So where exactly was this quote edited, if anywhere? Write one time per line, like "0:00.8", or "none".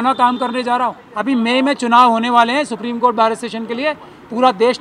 0:01.1